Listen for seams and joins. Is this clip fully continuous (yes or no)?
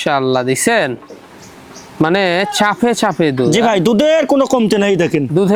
yes